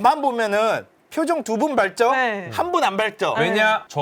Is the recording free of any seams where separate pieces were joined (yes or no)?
yes